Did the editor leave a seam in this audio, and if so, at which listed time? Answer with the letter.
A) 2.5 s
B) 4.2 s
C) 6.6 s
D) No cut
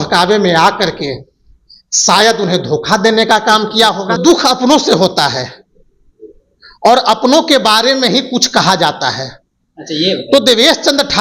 B